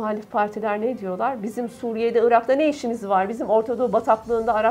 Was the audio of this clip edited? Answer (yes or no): no